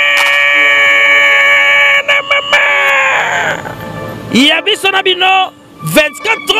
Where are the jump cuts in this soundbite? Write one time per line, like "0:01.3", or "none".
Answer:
none